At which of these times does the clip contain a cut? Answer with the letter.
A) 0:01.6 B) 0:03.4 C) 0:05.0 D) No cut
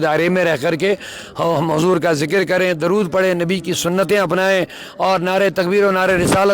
B